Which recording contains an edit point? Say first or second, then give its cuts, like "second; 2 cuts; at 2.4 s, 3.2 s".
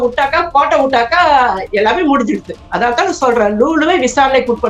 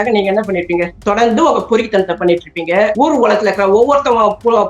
second; 2 cuts; at 0.9 s, 2.9 s